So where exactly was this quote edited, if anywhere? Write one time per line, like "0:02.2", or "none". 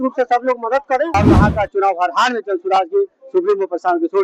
0:01.1

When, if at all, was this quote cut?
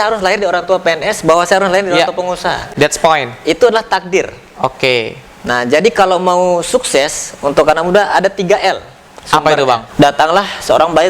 0:09.9

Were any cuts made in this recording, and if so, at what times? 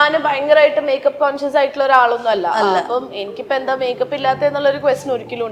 none

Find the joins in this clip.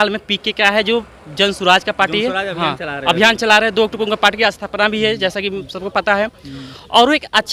none

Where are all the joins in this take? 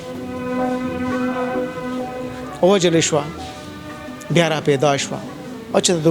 none

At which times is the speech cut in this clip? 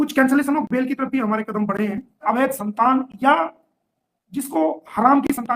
0:02.2

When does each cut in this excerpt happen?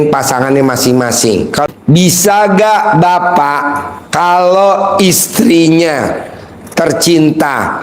0:01.7

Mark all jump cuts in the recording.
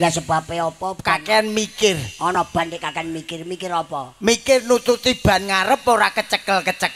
0:01.0

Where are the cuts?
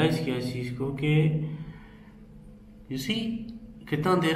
none

